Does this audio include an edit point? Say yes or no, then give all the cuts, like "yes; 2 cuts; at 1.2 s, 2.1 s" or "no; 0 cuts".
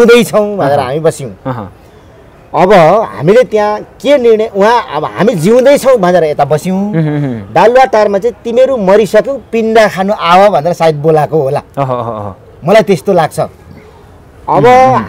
no; 0 cuts